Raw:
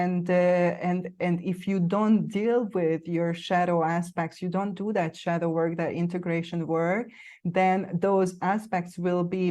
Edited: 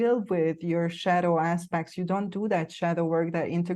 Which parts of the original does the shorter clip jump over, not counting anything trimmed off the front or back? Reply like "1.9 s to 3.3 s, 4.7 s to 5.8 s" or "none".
none